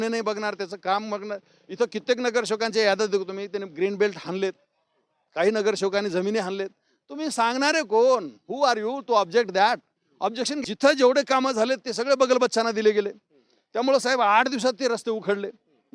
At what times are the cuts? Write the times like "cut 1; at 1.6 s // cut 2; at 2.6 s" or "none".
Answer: cut 1; at 10.5 s